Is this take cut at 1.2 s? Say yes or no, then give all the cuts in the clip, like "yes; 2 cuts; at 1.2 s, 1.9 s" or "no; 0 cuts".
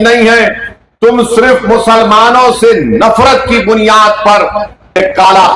no; 0 cuts